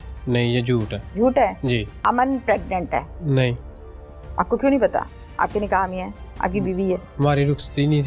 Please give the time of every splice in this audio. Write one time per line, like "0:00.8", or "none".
0:01.0
0:01.9
0:03.1